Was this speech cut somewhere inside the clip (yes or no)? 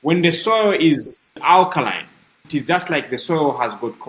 yes